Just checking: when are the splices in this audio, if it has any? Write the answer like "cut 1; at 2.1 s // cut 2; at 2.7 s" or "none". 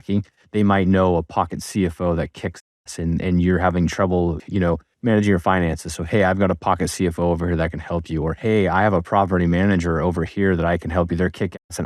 cut 1; at 4.4 s